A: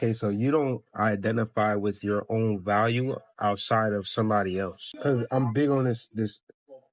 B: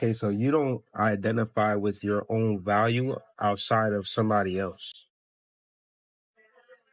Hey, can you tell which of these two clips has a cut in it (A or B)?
A